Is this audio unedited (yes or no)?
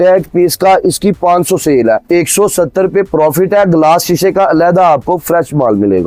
yes